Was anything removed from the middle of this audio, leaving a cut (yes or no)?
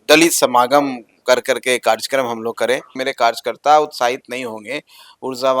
yes